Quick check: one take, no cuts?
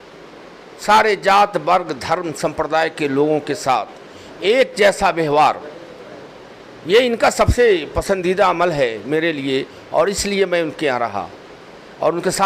yes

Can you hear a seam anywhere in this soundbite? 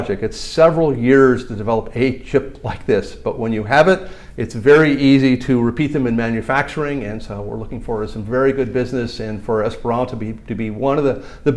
no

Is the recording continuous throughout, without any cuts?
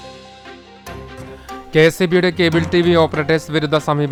yes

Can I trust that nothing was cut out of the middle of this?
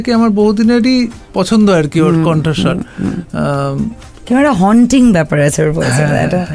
yes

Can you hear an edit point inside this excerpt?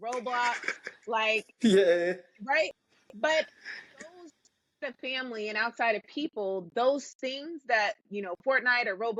no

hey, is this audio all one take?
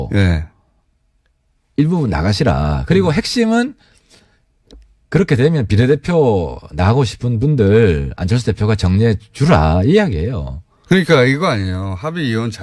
yes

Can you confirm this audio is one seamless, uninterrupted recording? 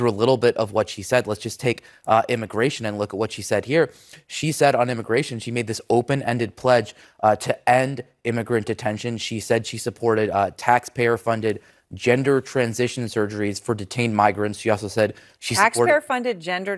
yes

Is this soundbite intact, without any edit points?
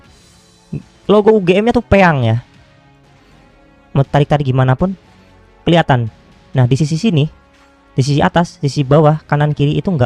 yes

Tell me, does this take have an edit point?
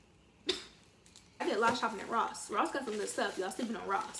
yes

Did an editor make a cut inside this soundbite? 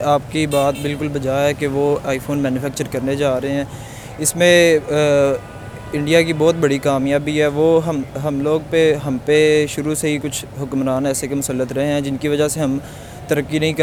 no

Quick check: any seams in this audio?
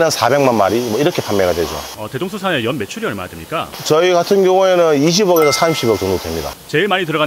no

